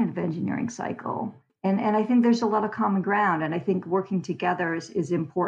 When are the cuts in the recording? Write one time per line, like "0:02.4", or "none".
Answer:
none